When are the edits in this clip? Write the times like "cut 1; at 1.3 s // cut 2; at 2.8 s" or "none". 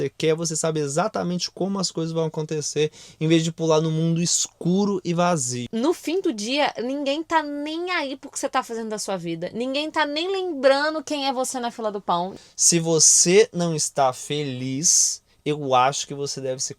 cut 1; at 5.6 s // cut 2; at 12.4 s